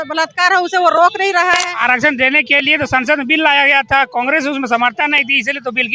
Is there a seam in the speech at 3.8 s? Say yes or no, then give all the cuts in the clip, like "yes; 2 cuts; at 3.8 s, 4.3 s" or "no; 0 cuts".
no; 1 cut; at 1.7 s